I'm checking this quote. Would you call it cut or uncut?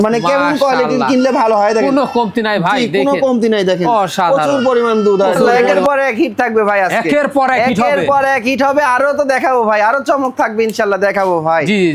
cut